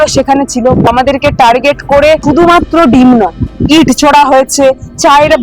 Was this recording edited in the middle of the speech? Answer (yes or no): yes